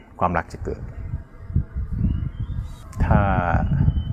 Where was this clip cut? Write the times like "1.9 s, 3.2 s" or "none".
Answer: 2.8 s